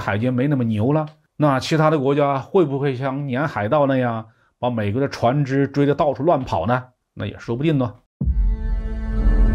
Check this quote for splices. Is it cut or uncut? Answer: cut